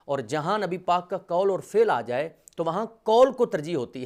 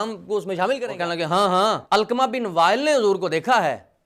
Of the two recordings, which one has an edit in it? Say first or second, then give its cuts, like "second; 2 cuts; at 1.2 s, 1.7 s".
second; 2 cuts; at 0.9 s, 1.8 s